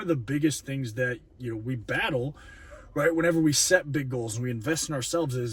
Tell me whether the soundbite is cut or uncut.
uncut